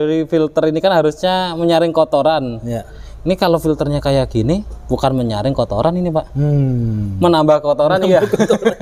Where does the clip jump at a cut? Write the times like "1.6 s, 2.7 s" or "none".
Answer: none